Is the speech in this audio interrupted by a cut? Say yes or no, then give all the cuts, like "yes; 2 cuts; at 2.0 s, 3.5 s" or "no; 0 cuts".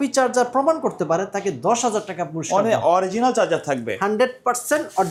no; 0 cuts